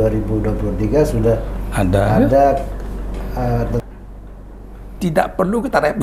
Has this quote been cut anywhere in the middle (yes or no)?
yes